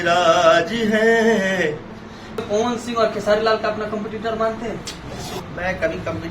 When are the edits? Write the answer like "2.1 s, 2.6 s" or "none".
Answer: 2.4 s, 5.4 s